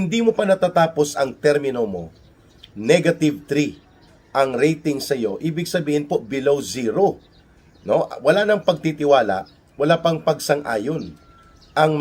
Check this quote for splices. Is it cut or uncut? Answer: uncut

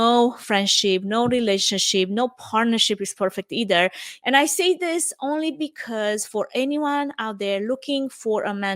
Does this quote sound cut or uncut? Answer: cut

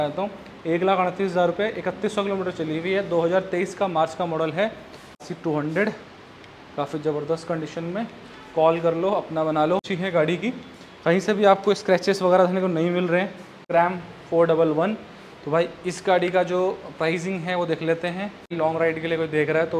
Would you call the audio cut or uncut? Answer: cut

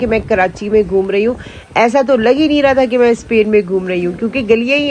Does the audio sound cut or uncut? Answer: uncut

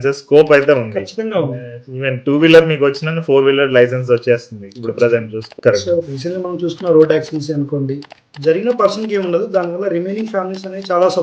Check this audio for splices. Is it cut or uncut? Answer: cut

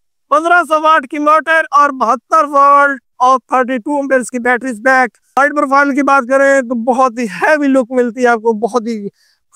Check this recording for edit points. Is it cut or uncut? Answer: cut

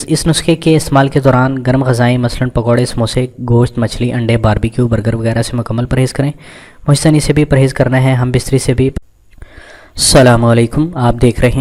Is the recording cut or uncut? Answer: uncut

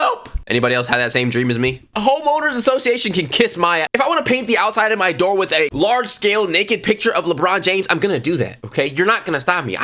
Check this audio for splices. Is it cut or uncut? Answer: cut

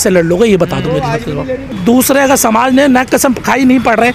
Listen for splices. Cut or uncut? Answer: cut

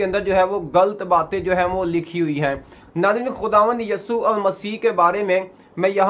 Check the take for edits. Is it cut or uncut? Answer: uncut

